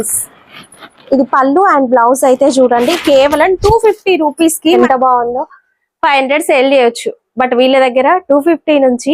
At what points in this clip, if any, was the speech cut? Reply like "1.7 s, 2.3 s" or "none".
4.8 s

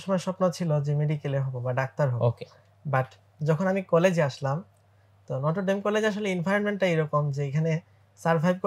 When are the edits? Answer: none

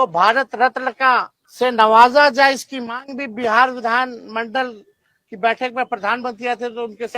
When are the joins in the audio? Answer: 1.4 s

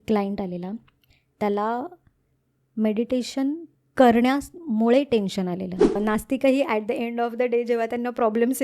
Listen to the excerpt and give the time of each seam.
6.0 s

